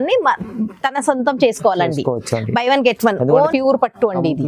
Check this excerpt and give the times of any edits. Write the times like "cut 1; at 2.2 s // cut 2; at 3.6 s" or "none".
cut 1; at 3.5 s